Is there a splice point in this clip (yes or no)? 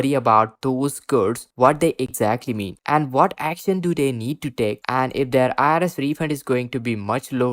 no